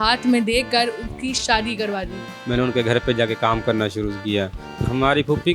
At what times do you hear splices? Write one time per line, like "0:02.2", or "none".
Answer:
0:02.3
0:04.6